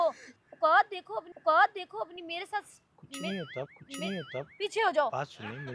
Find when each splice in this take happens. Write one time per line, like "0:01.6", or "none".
none